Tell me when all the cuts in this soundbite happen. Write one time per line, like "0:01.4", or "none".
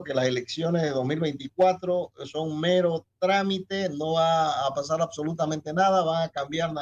none